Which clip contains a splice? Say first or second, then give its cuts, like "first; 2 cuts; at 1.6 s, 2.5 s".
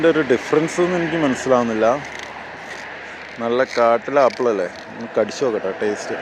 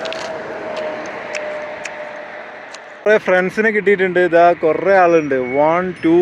second; 1 cut; at 3.0 s